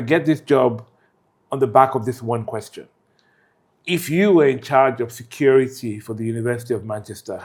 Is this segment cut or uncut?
uncut